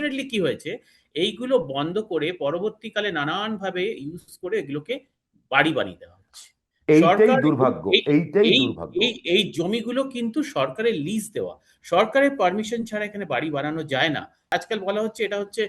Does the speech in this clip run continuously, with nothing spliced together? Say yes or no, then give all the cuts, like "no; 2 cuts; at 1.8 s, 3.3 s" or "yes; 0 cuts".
no; 1 cut; at 14.5 s